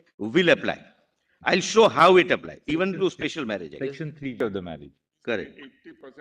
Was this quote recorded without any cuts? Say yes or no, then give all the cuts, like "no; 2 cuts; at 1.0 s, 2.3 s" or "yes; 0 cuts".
no; 1 cut; at 4.3 s